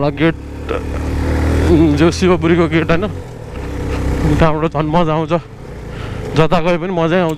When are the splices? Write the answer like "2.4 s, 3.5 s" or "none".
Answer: none